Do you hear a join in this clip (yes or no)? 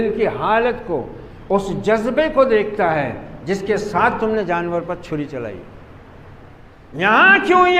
yes